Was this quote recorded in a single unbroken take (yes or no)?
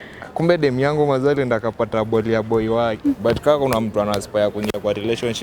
no